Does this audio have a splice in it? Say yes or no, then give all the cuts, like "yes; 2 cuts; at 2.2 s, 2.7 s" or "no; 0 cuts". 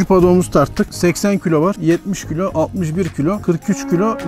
yes; 3 cuts; at 0.9 s, 1.8 s, 3.4 s